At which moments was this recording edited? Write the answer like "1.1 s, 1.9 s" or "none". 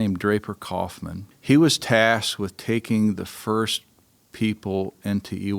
1.3 s